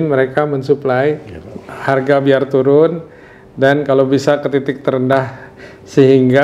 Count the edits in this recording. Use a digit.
0